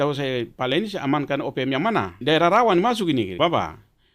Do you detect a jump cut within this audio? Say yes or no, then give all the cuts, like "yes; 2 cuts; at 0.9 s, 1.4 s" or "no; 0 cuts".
yes; 2 cuts; at 2.2 s, 3.3 s